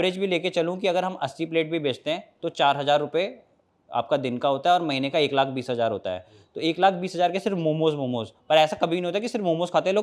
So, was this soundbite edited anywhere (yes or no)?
no